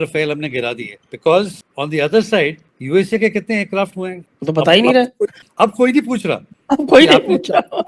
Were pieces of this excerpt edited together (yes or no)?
yes